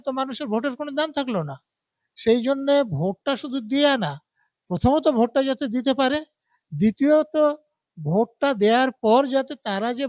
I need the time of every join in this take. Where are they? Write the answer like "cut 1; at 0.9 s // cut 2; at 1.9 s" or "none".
none